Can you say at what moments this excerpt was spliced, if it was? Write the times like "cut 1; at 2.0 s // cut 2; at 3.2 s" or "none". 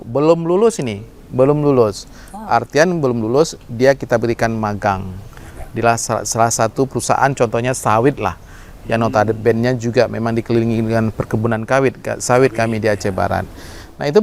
none